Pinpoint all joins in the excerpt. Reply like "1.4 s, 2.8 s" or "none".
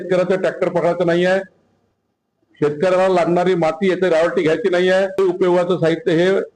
5.2 s